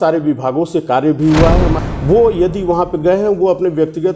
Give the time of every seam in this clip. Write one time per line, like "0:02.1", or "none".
0:01.8